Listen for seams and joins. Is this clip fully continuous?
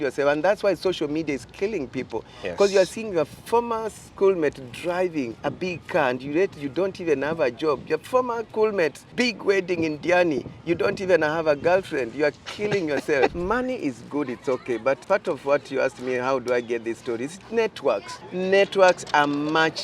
no; 6 cuts; at 5.3 s, 8.5 s, 9.0 s, 13.4 s, 15.0 s, 18.2 s

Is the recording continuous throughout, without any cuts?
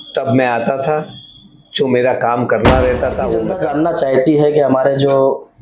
no; 1 cut; at 3.5 s

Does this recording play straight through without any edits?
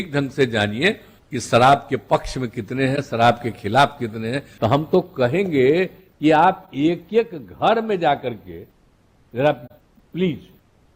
no; 1 cut; at 4.4 s

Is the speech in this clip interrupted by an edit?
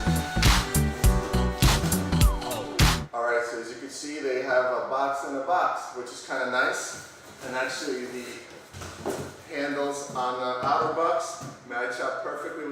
yes; 1 cut; at 2.9 s

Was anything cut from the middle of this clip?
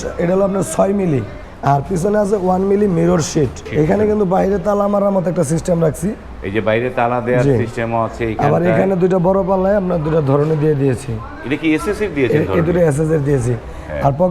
yes; 2 cuts; at 1.4 s, 3.7 s

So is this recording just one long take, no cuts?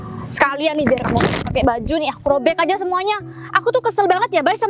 yes; 0 cuts

